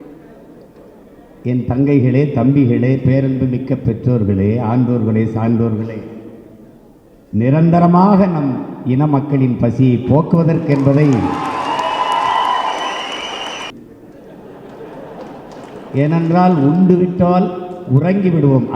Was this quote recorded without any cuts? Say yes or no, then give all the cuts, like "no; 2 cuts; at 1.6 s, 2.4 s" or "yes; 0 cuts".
no; 1 cut; at 13.7 s